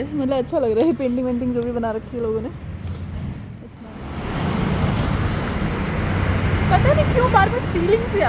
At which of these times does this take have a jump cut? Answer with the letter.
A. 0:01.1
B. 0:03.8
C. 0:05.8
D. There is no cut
B